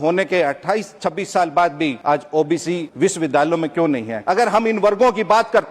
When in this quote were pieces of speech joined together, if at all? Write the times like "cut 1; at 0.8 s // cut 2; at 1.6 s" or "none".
cut 1; at 2.0 s // cut 2; at 2.9 s // cut 3; at 4.1 s